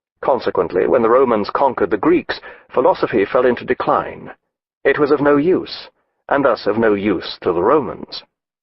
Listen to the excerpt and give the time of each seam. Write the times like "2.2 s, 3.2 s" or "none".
7.3 s